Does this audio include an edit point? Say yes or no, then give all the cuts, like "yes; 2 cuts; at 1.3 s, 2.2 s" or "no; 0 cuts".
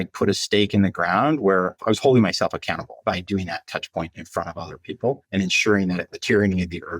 yes; 4 cuts; at 1.8 s, 3.0 s, 5.2 s, 6.1 s